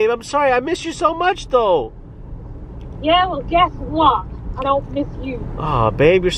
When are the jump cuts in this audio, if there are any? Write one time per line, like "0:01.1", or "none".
none